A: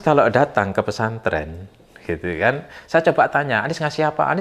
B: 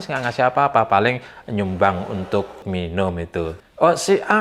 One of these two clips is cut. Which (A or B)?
B